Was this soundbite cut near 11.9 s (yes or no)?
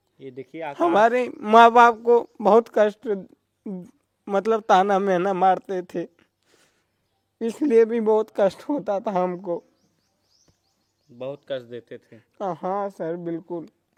no